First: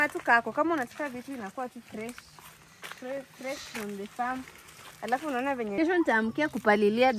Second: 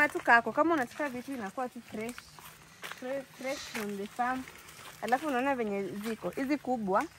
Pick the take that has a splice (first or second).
first